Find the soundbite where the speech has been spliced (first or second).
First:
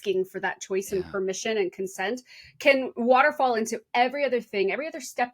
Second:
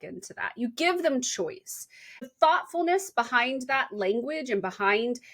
second